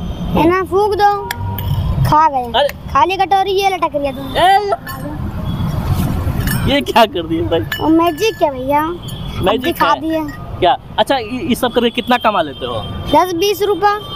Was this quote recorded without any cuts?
yes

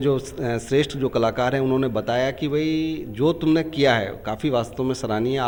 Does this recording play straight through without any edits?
yes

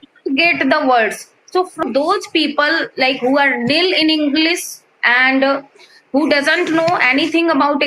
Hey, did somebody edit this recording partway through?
yes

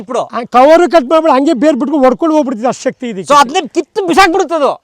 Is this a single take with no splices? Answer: yes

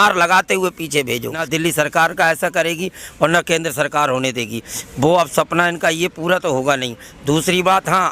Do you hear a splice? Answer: yes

